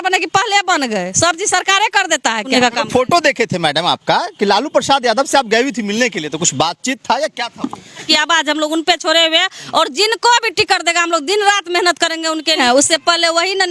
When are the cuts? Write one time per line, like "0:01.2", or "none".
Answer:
0:02.4
0:08.0
0:12.6